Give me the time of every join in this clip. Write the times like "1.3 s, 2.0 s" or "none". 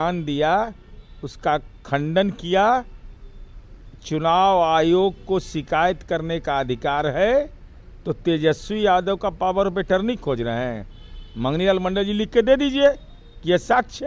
none